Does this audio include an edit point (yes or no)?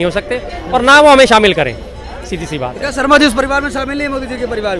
no